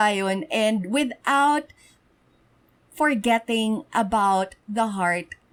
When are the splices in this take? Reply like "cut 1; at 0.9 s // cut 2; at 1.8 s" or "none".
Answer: none

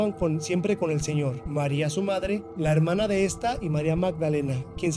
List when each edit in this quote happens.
cut 1; at 1.4 s // cut 2; at 2.5 s

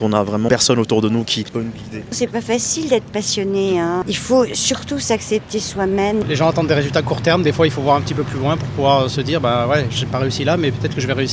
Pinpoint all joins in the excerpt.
cut 1; at 2.1 s // cut 2; at 6.2 s

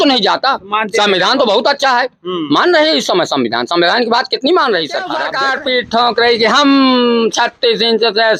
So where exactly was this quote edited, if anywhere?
cut 1; at 5.3 s

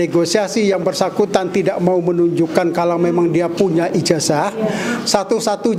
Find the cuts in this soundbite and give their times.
none

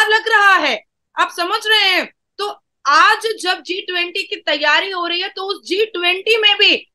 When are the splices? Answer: none

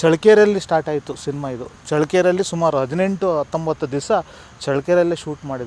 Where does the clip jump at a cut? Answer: none

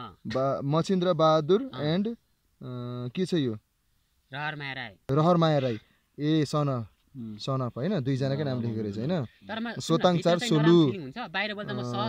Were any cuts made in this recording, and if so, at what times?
none

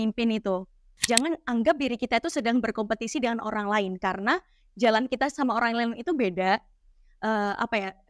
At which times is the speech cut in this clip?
cut 1; at 1.0 s

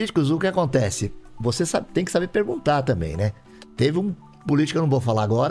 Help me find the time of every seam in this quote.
none

